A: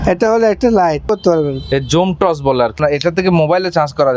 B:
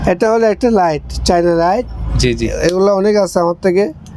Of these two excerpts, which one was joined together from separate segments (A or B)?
A